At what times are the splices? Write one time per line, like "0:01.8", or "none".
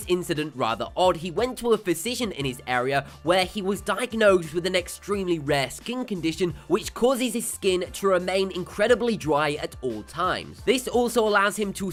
none